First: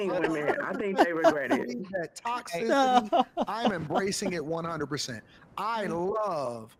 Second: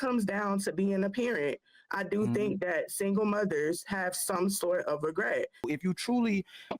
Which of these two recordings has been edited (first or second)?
second